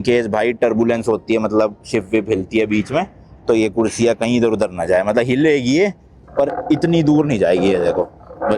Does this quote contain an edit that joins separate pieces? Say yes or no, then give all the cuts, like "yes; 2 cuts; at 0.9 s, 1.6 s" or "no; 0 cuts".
no; 0 cuts